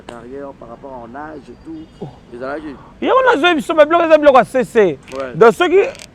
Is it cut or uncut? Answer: uncut